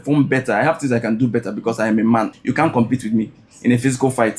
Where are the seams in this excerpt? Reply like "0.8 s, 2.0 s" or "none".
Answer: 2.3 s

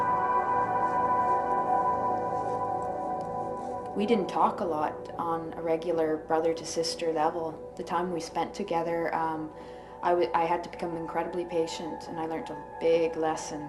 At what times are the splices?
none

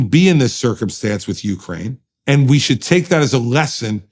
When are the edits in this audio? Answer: 2.1 s

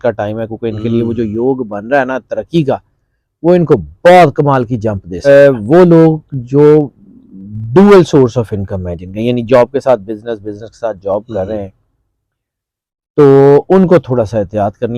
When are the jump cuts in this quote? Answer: 5.3 s

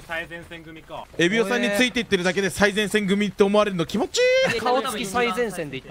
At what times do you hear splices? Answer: 1.0 s, 4.6 s

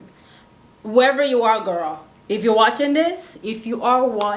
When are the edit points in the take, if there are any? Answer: none

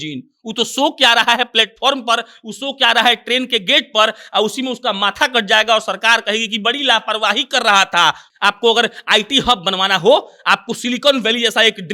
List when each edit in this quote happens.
8.2 s

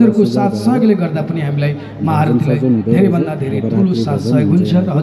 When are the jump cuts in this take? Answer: none

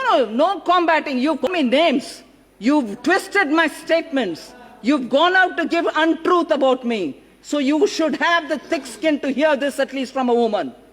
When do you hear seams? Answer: 1.4 s

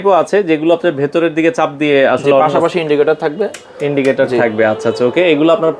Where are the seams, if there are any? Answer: none

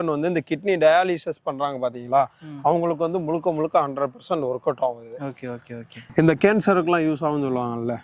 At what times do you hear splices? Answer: 6.1 s

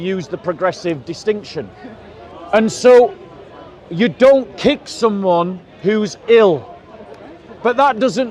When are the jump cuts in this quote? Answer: none

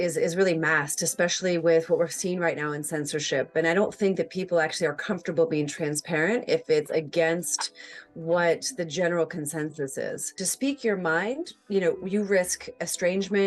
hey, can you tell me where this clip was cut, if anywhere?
10.4 s

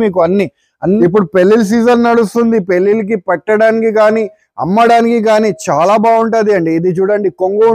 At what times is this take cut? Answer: 1.0 s

